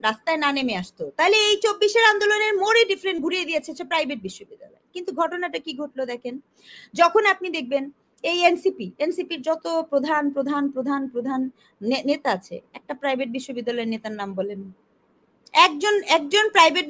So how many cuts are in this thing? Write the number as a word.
zero